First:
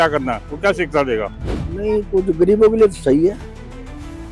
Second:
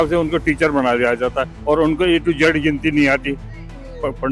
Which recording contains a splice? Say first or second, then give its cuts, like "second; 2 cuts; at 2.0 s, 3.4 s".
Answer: first; 1 cut; at 1.4 s